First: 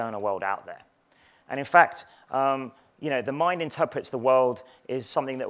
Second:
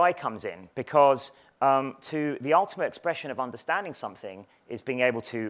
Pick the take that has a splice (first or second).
first